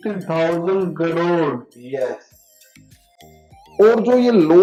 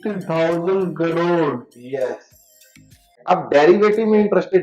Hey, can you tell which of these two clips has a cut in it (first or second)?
second